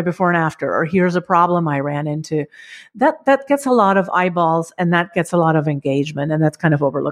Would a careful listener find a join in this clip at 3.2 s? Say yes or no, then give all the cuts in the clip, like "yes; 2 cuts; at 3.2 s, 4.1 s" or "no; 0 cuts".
no; 0 cuts